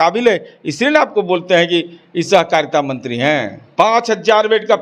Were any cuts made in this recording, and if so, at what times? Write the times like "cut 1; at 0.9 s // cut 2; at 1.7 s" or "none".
cut 1; at 3.6 s